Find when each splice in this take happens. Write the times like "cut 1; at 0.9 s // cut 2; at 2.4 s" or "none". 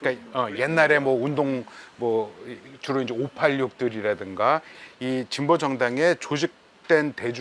cut 1; at 4.8 s